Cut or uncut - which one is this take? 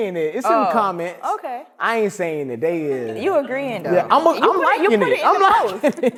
uncut